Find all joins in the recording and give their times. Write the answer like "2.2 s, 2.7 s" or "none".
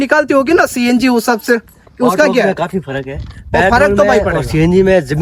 none